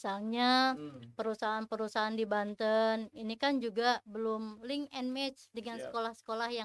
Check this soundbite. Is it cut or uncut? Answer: uncut